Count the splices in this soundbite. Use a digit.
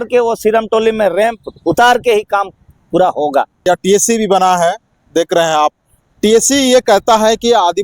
1